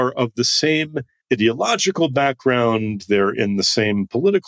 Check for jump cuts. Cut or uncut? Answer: cut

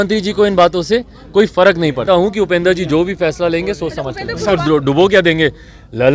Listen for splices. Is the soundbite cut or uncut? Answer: cut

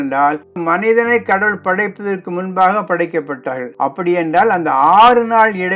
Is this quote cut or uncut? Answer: uncut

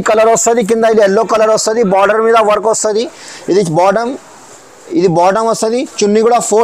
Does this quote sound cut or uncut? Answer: uncut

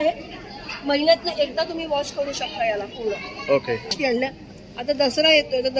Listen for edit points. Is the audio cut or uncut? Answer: cut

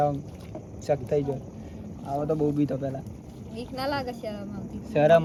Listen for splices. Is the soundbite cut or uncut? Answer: uncut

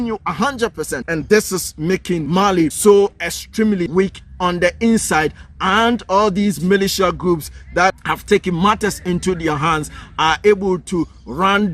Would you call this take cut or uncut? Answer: cut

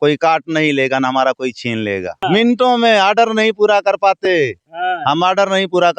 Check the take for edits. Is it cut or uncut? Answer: cut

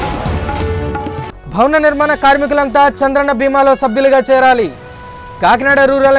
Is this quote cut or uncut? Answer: uncut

